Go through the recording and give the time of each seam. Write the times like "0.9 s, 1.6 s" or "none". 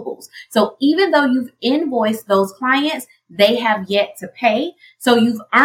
none